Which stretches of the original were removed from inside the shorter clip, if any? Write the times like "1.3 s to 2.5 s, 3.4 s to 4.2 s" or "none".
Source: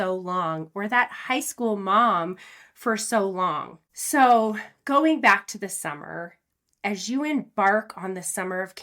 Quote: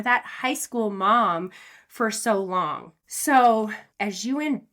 4.7 s to 6.7 s